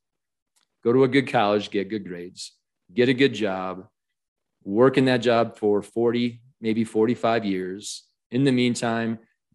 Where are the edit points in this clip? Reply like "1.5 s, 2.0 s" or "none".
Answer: none